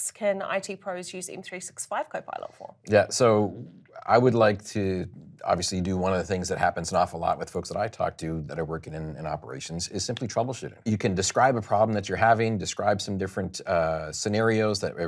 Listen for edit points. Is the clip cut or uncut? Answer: cut